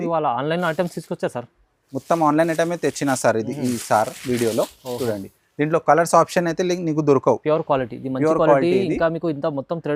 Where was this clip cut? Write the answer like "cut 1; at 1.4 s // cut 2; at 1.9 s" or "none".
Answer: none